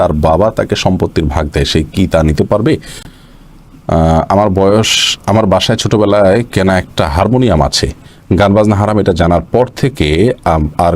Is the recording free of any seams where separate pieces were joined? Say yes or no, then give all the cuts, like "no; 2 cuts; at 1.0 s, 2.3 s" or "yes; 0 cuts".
no; 1 cut; at 3.1 s